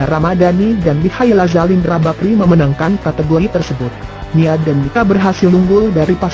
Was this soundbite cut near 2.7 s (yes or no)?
no